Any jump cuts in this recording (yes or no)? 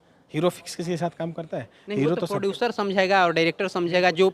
no